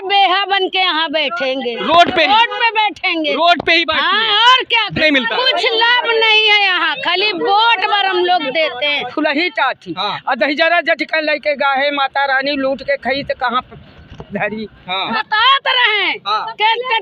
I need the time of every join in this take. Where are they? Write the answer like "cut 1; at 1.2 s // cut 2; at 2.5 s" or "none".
cut 1; at 5.0 s // cut 2; at 9.1 s // cut 3; at 15.1 s